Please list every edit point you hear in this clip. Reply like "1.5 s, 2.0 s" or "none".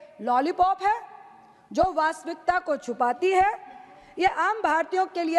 none